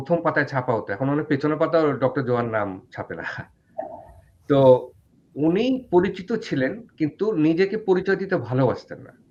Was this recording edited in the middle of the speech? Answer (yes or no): no